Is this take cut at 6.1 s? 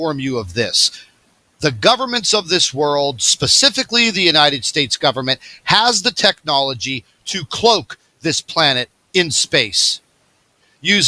no; 1 cut; at 1.9 s

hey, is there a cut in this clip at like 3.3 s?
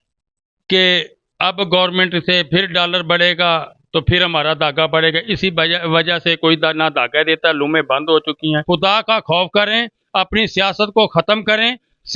no; 1 cut; at 8.6 s

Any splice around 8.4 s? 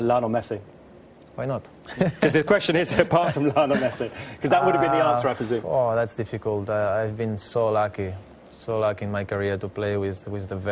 yes; 1 cut; at 8.4 s

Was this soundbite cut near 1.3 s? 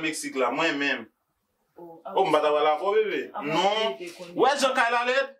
no; 0 cuts

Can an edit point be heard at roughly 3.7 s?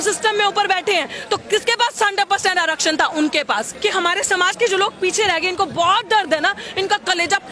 yes; 1 cut; at 3.7 s

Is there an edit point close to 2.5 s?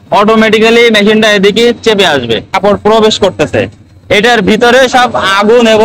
yes; 1 cut; at 2.5 s

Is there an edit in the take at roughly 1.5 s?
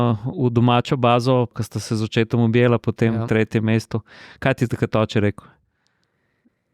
yes; 1 cut; at 1.5 s

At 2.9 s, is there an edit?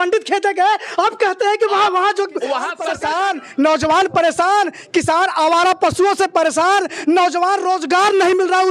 yes; 1 cut; at 2.9 s

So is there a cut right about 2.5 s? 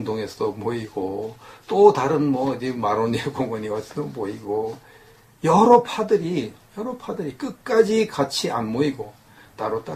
no; 1 cut; at 4.1 s

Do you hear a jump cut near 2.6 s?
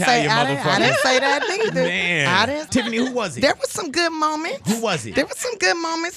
yes; 1 cut; at 2.6 s

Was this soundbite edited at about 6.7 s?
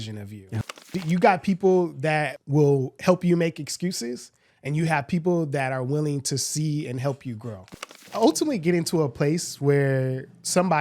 no; 3 cuts; at 0.7 s, 2.4 s, 8.0 s

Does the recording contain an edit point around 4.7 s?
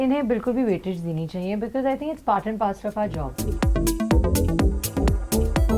no; 1 cut; at 3.4 s

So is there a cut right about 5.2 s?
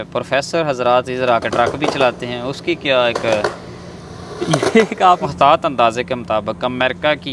yes; 1 cut; at 5.2 s

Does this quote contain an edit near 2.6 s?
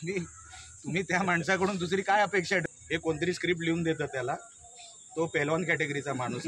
yes; 1 cut; at 2.6 s

